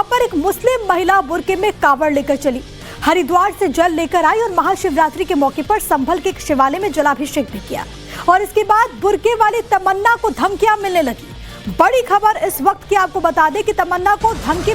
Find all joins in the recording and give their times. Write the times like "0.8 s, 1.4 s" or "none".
5.6 s